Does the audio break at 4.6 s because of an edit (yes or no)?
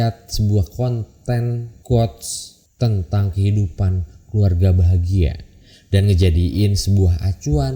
no